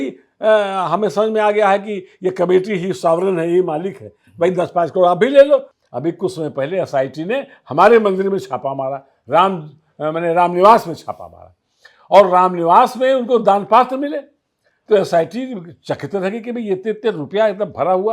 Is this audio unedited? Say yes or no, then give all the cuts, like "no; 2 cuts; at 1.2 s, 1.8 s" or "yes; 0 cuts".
no; 1 cut; at 5.8 s